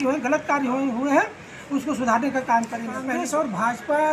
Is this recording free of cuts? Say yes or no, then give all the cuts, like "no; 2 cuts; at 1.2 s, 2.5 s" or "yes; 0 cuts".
no; 1 cut; at 3.1 s